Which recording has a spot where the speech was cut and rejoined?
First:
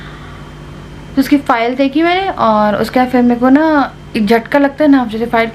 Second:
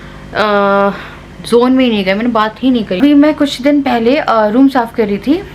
second; 1 cut; at 3.0 s

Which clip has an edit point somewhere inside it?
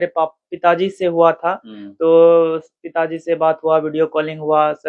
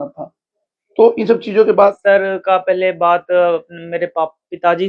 second; 1 cut; at 2.0 s

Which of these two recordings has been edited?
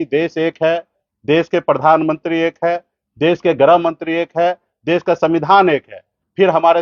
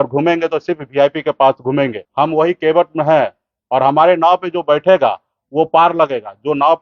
second; 1 cut; at 2.0 s

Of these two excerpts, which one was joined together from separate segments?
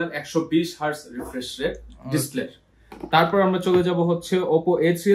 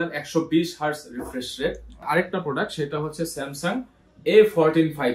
second; 1 cut; at 2.0 s

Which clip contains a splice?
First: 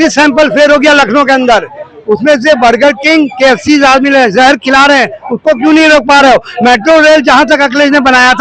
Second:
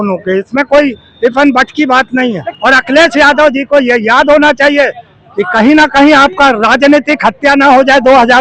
second; 1 cut; at 2.5 s

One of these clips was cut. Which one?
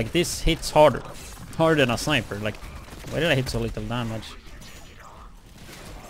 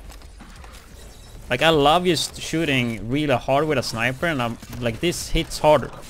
first; 1 cut; at 2.6 s

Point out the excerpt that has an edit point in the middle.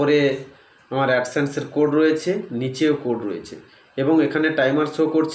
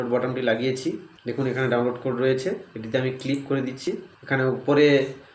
second; 2 cuts; at 1.1 s, 3.8 s

